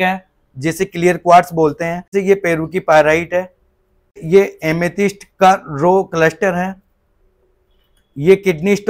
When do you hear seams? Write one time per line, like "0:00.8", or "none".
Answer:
0:02.1
0:04.2